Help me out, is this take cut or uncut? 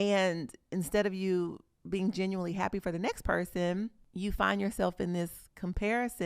cut